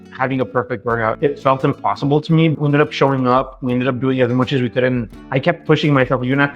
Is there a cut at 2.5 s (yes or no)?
yes